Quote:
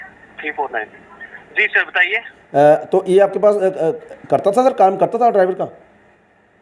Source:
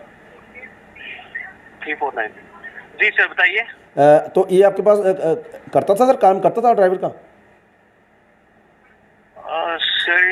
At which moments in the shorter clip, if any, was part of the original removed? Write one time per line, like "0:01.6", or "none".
none